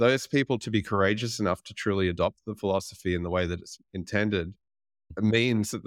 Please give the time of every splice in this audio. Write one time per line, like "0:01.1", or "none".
none